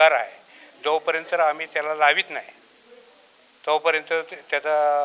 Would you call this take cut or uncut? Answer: uncut